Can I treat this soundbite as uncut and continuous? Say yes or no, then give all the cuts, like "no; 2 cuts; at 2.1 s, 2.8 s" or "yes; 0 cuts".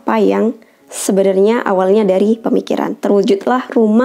yes; 0 cuts